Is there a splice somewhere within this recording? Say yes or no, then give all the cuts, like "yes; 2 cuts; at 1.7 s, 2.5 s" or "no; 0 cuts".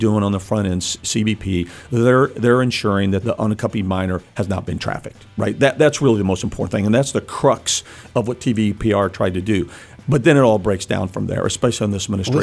yes; 1 cut; at 3.2 s